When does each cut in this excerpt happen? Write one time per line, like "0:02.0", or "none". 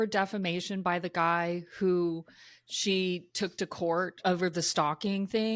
0:04.2